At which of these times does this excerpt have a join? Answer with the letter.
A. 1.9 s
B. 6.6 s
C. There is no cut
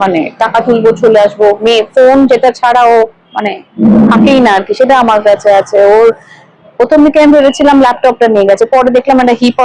C